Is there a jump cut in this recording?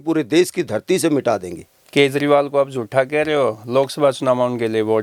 no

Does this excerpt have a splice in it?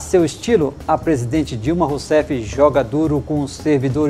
no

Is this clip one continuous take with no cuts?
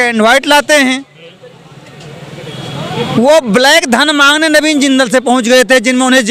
yes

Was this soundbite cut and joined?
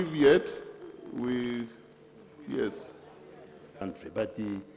yes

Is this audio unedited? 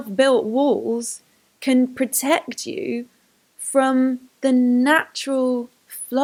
yes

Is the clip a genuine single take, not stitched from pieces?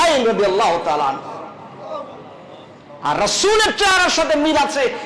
yes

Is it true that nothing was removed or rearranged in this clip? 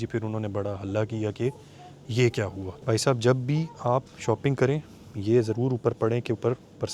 yes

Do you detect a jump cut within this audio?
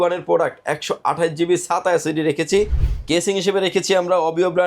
yes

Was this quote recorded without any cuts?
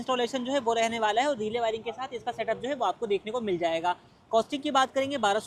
yes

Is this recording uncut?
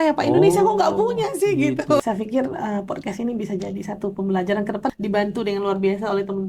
no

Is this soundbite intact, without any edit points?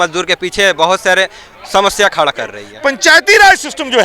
no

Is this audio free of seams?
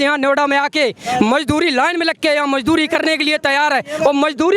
yes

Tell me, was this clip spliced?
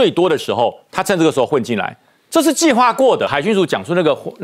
yes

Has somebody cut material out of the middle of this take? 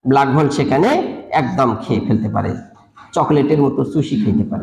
no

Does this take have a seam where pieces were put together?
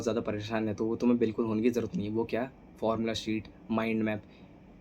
no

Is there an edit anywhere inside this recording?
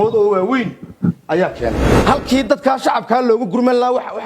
yes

